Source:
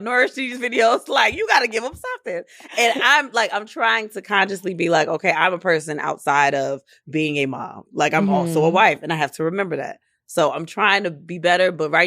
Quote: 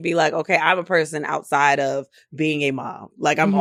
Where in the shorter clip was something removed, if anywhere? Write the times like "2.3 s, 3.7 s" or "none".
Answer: none